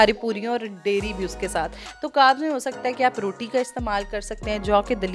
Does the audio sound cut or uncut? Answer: uncut